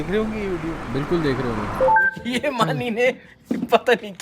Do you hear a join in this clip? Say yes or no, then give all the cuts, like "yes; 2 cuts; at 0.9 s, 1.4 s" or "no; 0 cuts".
yes; 1 cut; at 1.9 s